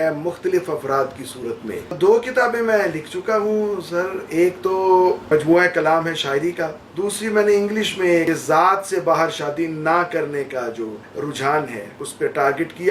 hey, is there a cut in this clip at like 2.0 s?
yes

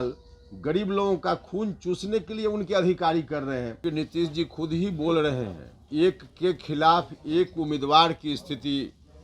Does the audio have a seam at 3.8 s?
yes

